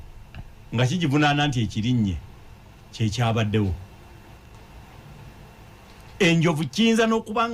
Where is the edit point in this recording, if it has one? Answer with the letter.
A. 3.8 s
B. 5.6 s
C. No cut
C